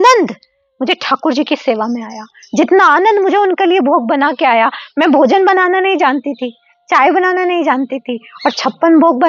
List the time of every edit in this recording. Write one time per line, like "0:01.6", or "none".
none